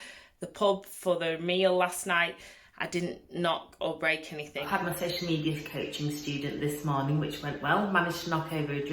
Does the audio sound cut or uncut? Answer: cut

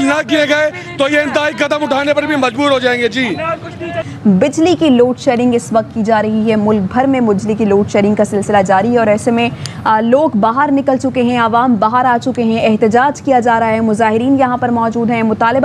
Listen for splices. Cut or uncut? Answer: uncut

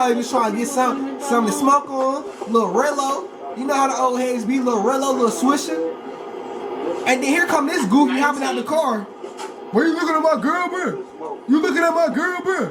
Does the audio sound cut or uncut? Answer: uncut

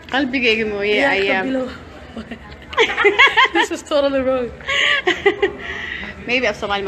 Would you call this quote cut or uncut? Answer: uncut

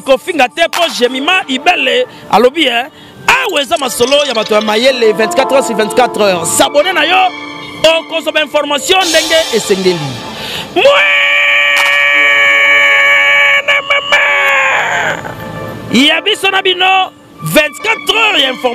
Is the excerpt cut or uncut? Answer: uncut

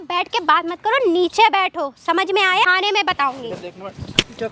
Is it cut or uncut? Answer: cut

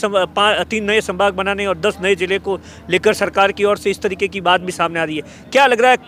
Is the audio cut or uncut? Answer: uncut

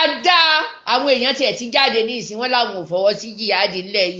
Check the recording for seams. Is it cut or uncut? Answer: uncut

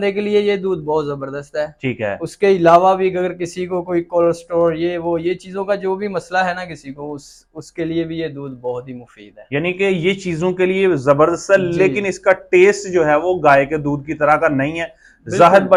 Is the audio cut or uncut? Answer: uncut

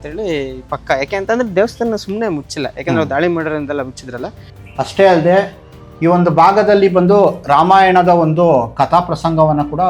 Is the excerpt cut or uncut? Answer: cut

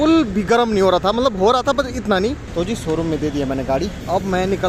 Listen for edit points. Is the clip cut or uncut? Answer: cut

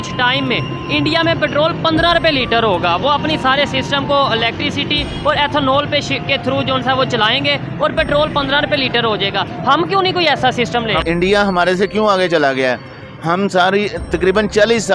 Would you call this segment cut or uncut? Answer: cut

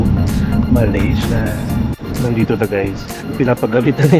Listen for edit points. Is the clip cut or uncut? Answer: cut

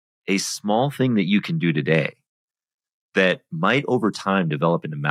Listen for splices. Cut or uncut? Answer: uncut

